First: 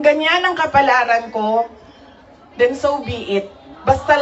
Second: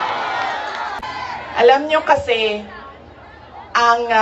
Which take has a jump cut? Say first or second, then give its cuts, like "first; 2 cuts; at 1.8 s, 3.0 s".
second; 1 cut; at 1.0 s